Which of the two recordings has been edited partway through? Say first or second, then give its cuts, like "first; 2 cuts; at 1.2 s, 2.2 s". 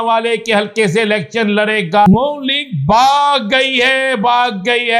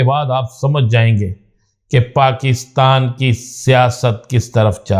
first; 1 cut; at 2.1 s